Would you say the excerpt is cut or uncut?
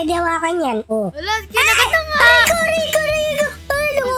uncut